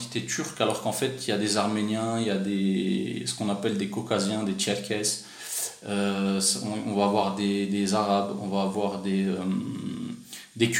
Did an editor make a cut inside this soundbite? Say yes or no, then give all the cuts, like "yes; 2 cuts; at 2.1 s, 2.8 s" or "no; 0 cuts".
no; 0 cuts